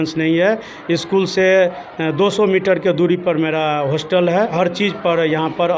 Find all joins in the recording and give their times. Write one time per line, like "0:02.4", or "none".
0:04.5